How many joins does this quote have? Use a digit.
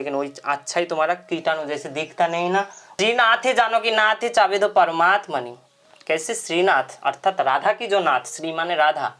1